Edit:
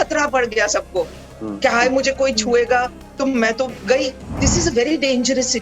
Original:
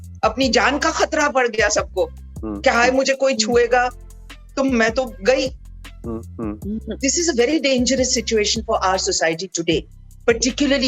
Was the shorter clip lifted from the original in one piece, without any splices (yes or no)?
no